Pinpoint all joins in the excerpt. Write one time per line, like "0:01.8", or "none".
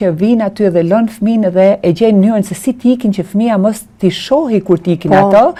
none